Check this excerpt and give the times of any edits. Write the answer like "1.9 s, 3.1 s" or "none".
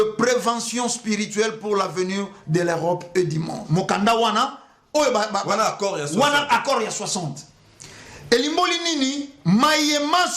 3.6 s